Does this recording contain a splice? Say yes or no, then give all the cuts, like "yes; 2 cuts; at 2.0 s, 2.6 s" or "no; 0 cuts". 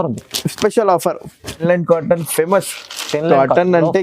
yes; 1 cut; at 1.5 s